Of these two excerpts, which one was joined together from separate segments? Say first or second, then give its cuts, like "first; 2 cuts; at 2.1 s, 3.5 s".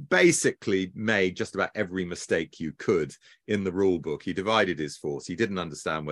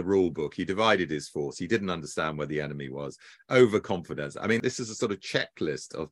second; 1 cut; at 4.6 s